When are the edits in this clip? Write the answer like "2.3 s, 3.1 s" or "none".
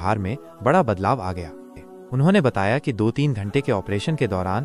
1.7 s